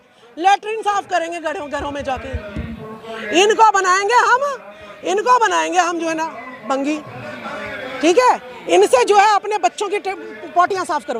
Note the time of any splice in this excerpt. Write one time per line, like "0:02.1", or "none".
none